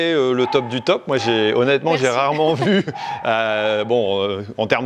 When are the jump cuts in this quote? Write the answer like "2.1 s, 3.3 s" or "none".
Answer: none